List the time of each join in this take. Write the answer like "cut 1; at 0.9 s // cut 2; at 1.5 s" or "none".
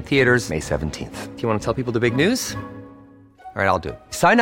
none